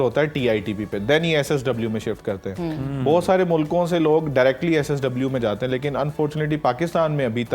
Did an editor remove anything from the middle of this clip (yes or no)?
no